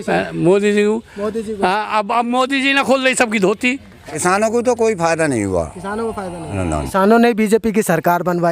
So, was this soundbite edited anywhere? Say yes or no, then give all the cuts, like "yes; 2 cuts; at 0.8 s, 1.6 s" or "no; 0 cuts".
yes; 2 cuts; at 4.2 s, 6.7 s